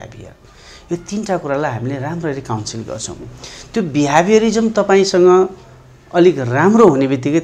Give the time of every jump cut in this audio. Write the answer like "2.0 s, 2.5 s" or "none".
none

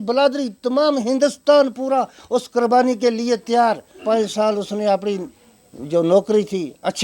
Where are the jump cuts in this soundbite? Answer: 4.0 s

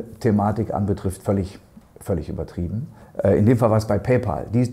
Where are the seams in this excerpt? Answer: 3.0 s

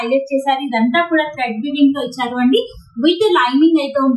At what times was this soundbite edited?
none

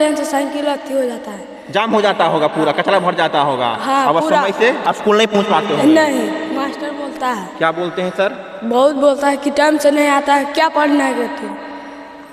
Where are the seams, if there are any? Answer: none

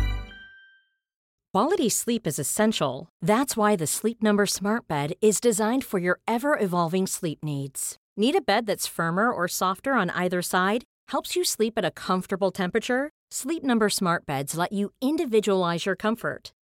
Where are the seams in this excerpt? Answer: 1.2 s

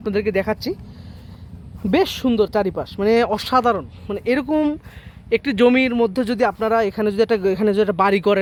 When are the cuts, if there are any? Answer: none

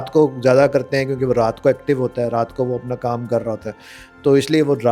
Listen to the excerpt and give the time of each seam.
none

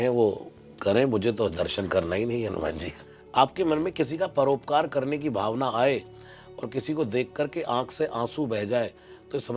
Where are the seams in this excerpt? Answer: 2.9 s

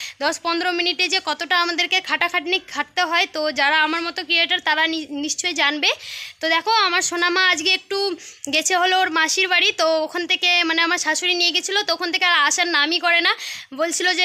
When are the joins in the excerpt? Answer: none

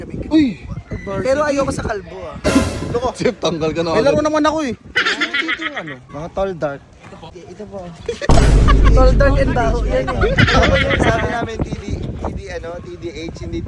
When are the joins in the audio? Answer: 6.1 s, 7.3 s

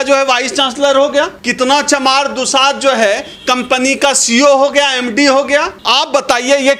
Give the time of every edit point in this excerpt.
1.4 s, 5.8 s

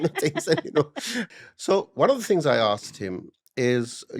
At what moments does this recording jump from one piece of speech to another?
1.3 s

